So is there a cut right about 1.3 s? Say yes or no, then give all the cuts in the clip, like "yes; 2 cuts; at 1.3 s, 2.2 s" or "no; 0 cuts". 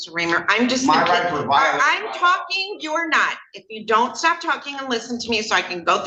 no; 0 cuts